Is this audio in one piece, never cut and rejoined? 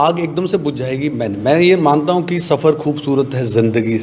yes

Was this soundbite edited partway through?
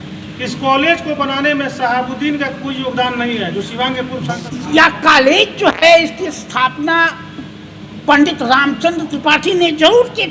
yes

